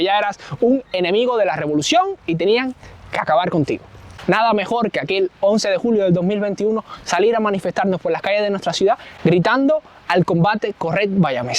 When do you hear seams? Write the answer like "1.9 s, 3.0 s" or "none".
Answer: 4.0 s, 9.1 s